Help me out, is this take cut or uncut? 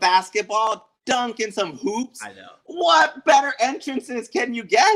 uncut